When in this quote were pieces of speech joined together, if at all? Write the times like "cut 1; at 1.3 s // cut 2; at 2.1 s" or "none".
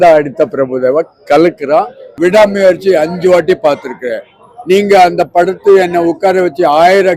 cut 1; at 2.1 s

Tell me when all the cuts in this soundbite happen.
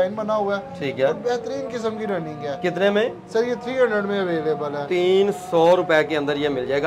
none

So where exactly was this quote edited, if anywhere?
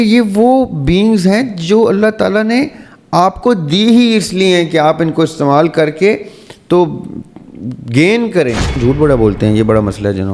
cut 1; at 8.8 s

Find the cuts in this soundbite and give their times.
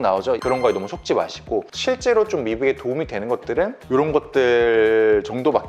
none

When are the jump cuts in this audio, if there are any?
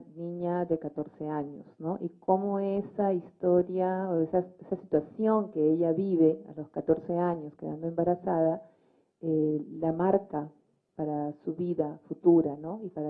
cut 1; at 2.1 s

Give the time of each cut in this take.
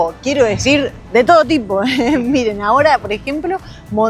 none

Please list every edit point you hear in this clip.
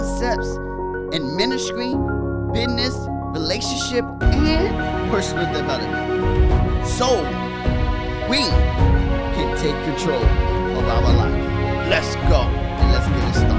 none

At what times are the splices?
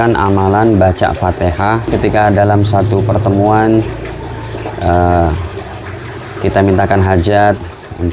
cut 1; at 1.9 s

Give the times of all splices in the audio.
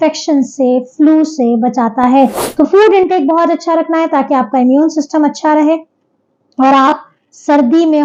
none

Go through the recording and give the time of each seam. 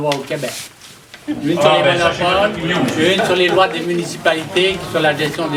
none

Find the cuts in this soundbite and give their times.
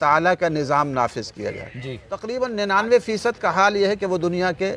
cut 1; at 2.1 s

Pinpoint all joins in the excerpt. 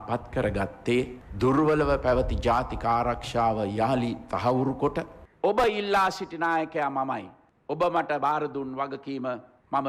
cut 1; at 1.2 s // cut 2; at 5.2 s

